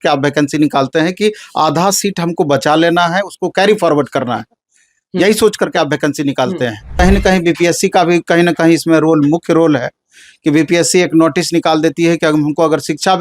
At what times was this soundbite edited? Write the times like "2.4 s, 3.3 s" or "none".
7.0 s